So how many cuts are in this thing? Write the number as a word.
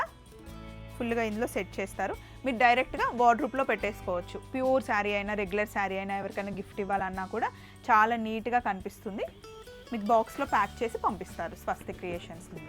zero